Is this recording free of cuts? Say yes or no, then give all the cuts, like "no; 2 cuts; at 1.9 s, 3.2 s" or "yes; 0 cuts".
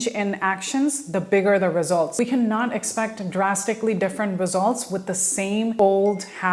no; 1 cut; at 2.1 s